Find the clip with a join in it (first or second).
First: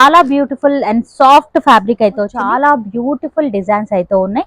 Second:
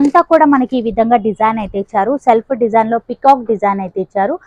first